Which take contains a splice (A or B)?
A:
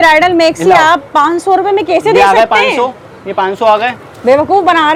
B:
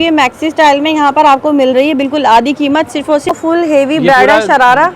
B